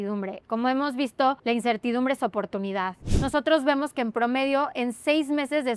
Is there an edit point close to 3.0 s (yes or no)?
yes